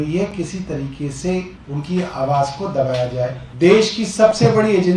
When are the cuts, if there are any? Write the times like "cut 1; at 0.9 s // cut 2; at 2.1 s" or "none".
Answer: cut 1; at 1.6 s // cut 2; at 3.4 s